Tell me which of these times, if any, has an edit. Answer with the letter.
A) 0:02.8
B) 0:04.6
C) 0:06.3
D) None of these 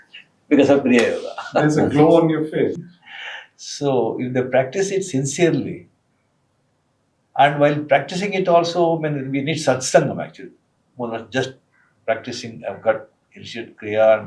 A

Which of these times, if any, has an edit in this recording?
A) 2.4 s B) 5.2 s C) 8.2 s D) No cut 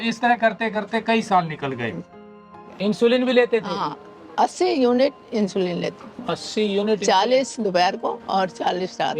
A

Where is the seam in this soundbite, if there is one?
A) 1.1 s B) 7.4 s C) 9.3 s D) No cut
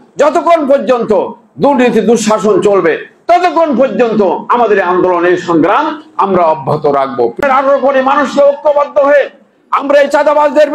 B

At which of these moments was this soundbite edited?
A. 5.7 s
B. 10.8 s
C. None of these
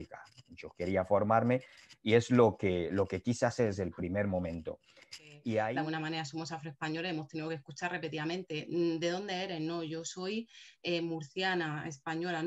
A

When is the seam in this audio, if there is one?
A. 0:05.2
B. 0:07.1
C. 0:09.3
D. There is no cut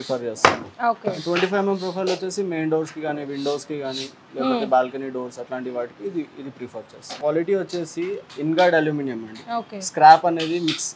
B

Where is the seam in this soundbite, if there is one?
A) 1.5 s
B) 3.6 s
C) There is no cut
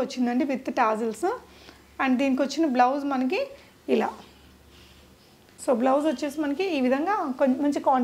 C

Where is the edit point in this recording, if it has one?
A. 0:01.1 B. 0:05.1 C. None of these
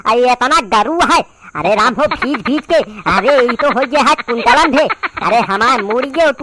B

